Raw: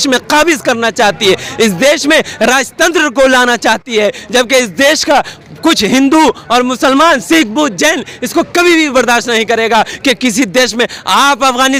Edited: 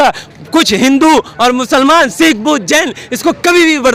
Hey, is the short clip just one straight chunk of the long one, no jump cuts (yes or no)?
yes